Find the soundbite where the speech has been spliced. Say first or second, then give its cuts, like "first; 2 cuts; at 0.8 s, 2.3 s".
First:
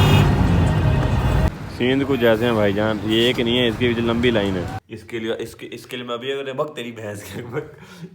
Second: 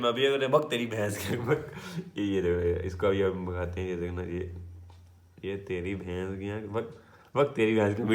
first; 1 cut; at 4.7 s